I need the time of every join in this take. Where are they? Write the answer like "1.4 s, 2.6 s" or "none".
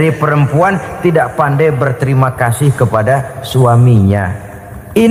none